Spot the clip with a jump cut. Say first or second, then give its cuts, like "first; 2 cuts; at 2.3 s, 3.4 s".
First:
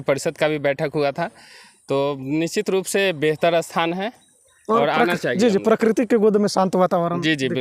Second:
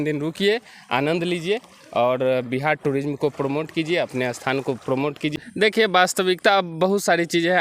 second; 1 cut; at 5.3 s